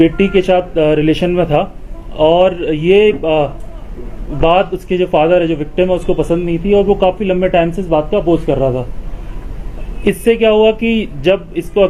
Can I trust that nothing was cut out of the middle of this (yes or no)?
yes